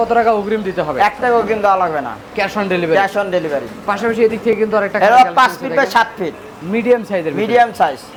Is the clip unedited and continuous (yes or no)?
yes